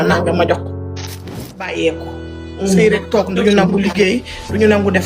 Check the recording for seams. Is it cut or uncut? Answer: cut